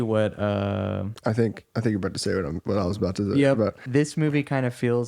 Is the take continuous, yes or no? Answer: no